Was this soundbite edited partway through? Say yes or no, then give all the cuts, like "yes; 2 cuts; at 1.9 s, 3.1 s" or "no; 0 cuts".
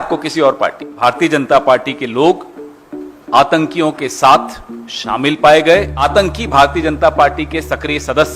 yes; 2 cuts; at 1.0 s, 6.0 s